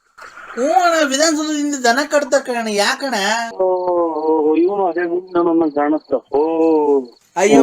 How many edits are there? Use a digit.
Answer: 1